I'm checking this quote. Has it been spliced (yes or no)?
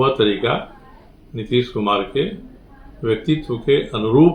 no